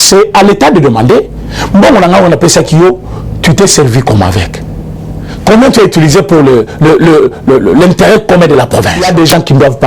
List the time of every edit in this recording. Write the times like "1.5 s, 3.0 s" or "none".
8.9 s